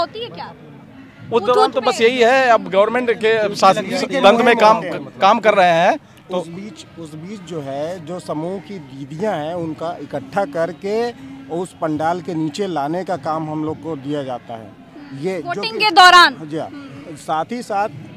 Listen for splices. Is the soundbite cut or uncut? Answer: uncut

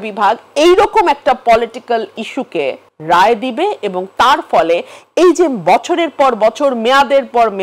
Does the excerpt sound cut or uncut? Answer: cut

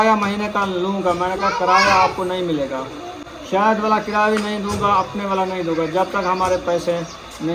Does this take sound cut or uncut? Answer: uncut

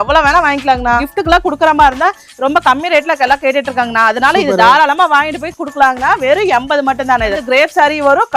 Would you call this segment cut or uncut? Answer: cut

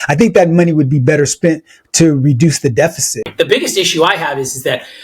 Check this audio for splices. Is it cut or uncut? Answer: cut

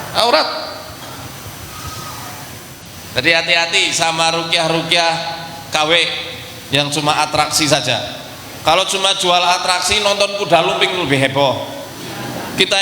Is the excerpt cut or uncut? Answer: cut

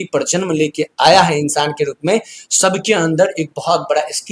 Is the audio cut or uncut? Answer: uncut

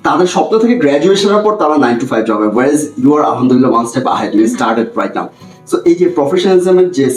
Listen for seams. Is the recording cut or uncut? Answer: uncut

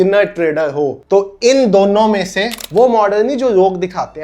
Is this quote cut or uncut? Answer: cut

